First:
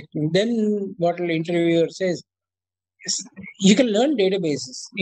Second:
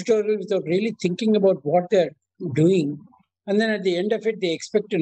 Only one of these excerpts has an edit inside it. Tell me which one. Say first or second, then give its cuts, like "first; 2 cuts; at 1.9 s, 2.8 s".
first; 1 cut; at 2.3 s